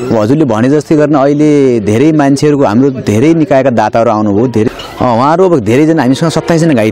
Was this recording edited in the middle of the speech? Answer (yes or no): yes